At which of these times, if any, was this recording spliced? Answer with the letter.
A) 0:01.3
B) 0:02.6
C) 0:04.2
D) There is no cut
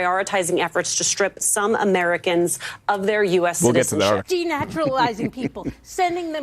C